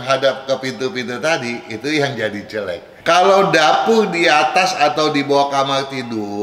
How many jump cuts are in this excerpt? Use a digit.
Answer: 1